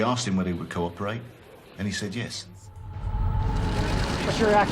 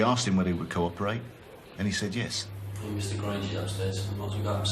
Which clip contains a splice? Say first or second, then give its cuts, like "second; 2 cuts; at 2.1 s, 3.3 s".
first; 1 cut; at 2.8 s